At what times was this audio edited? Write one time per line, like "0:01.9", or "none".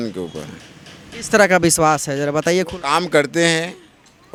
none